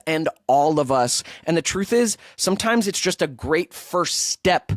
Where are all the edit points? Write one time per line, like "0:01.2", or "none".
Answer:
none